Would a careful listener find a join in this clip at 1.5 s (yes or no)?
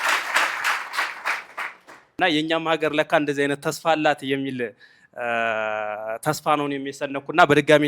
no